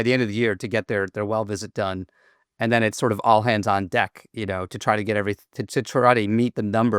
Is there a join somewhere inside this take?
no; 0 cuts

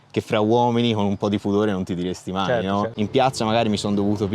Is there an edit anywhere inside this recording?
yes; 1 cut; at 2.9 s

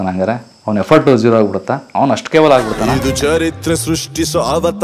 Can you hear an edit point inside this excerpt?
yes; 2 cuts; at 1.8 s, 2.8 s

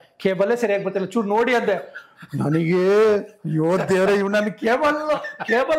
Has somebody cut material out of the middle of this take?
no; 0 cuts

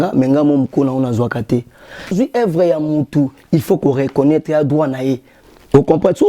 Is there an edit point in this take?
yes; 1 cut; at 2.1 s

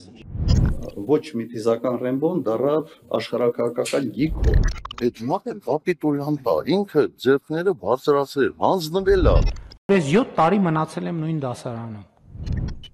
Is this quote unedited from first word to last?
yes; 0 cuts

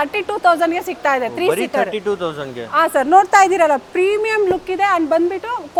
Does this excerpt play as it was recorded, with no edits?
yes; 0 cuts

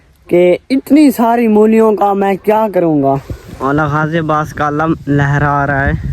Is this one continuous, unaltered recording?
no; 1 cut; at 3.4 s

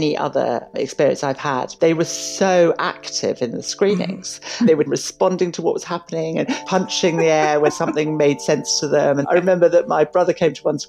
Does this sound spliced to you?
yes; 5 cuts; at 1.7 s, 4.8 s, 6.6 s, 7.7 s, 9.2 s

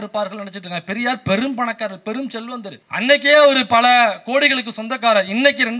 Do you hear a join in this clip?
no; 0 cuts

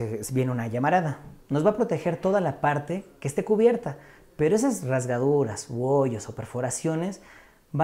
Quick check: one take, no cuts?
yes; 0 cuts

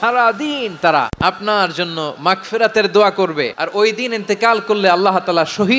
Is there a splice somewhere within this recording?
yes; 2 cuts; at 1.1 s, 3.6 s

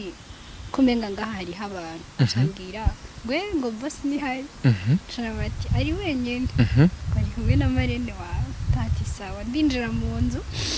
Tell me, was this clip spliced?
no; 0 cuts

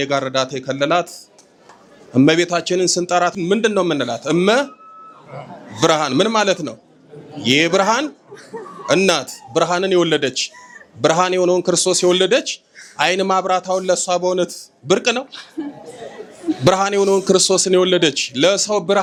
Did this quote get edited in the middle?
no; 0 cuts

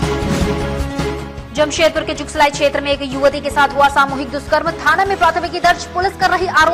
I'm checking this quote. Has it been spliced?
yes; 1 cut; at 1.4 s

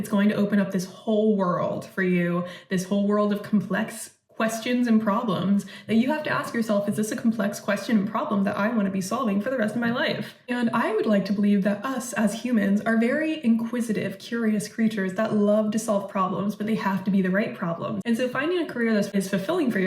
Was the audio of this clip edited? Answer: yes; 2 cuts; at 18.0 s, 19.1 s

